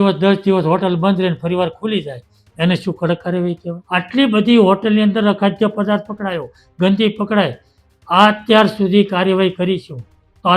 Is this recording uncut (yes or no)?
no